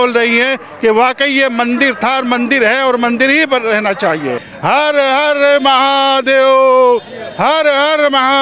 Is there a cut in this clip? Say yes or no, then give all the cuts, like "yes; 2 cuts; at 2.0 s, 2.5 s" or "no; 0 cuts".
yes; 1 cut; at 4.5 s